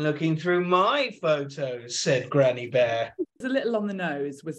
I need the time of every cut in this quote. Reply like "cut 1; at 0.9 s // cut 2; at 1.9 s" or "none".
cut 1; at 3.3 s